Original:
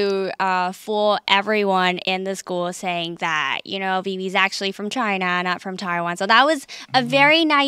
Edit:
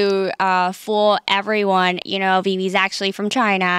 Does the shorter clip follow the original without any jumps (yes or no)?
no